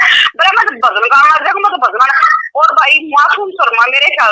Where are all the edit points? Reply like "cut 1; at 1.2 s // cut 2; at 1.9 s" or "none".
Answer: none